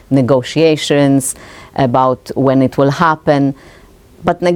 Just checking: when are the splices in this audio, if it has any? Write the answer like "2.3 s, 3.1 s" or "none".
none